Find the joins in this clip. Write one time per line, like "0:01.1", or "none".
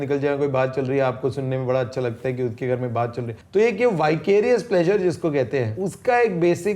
0:03.3
0:05.8